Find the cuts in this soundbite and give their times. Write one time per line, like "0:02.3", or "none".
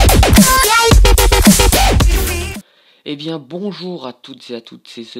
0:01.9